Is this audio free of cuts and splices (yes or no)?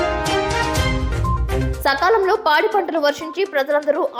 yes